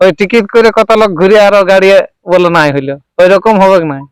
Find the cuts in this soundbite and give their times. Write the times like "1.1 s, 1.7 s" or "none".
none